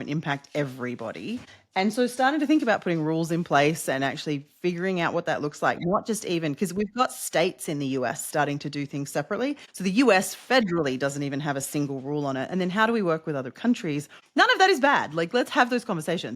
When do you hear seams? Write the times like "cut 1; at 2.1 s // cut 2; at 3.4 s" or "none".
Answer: cut 1; at 1.6 s // cut 2; at 9.7 s // cut 3; at 14.1 s